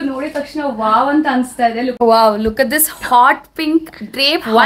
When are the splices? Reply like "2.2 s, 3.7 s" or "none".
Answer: 1.9 s